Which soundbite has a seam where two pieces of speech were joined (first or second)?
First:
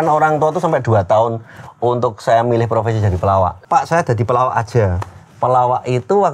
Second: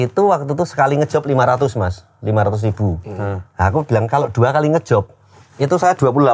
first